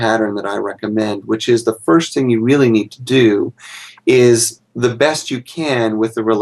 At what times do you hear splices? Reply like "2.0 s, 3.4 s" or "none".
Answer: none